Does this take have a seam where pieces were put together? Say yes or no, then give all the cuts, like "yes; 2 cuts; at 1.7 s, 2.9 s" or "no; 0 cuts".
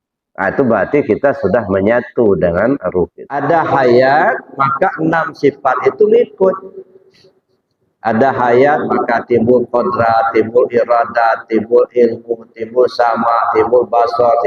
yes; 1 cut; at 3.3 s